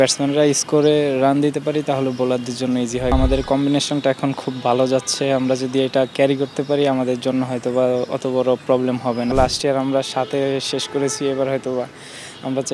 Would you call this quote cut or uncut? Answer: cut